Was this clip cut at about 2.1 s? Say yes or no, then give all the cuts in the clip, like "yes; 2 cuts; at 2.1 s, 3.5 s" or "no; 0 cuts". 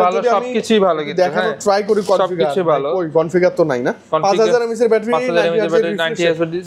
no; 0 cuts